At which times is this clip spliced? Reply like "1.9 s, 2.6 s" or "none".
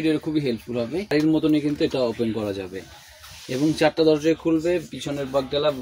1.1 s

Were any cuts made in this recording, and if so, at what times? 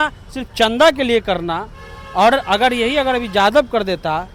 none

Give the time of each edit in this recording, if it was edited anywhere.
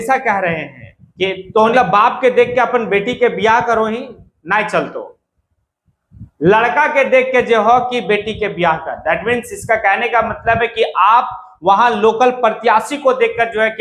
1.7 s

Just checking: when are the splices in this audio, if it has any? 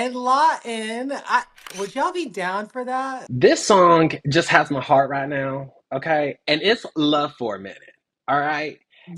1.6 s, 3.2 s

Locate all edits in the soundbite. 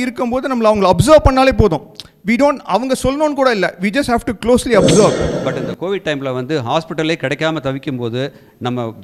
5.3 s

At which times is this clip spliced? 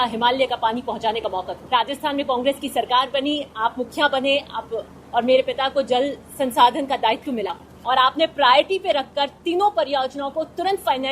1.6 s, 7.7 s

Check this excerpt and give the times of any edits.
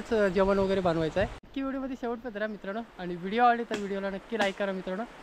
1.4 s

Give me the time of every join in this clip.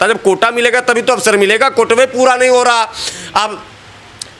none

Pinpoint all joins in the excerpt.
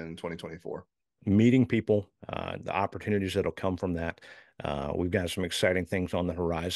1.2 s

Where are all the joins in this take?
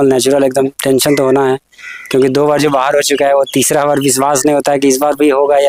none

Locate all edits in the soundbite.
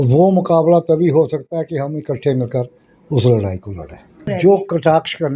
4.2 s

